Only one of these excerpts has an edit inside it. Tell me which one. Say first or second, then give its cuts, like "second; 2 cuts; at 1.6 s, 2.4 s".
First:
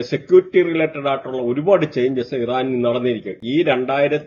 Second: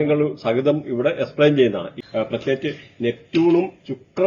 second; 1 cut; at 1.9 s